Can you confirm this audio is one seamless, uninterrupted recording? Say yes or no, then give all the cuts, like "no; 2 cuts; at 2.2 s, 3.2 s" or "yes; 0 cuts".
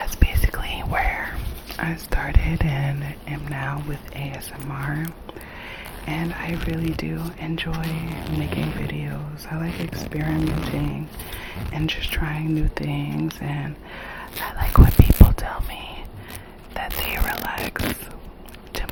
yes; 0 cuts